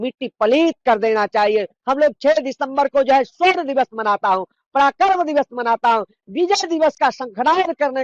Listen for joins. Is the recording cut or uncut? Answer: cut